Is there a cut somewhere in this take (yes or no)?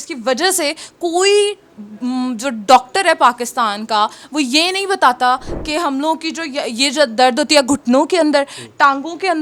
no